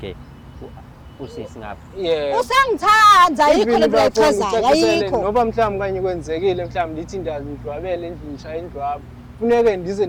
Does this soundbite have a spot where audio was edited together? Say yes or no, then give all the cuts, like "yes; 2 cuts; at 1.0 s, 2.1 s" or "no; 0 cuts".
no; 0 cuts